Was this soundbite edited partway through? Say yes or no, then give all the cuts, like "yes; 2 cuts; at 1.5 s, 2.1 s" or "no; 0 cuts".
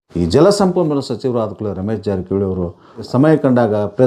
no; 0 cuts